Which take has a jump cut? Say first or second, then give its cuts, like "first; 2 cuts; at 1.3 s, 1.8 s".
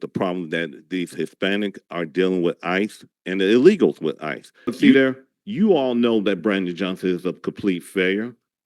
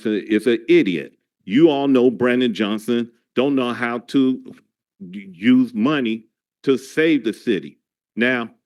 first; 1 cut; at 4.9 s